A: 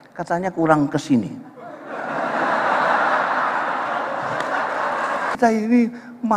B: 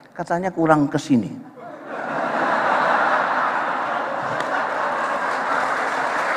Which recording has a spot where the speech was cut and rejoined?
A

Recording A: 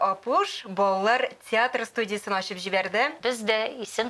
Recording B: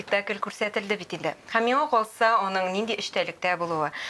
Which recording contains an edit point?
A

